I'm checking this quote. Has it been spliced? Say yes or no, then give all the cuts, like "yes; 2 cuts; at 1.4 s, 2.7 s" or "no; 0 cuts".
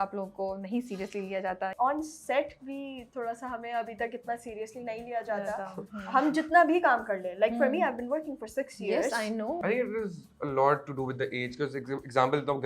yes; 2 cuts; at 1.7 s, 9.6 s